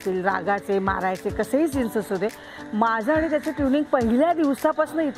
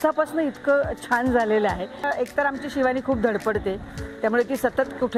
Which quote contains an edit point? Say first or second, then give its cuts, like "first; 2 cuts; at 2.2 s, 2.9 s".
second; 1 cut; at 2.0 s